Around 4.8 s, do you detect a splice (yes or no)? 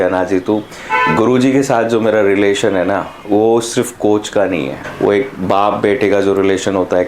yes